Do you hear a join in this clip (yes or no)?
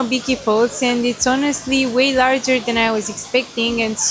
no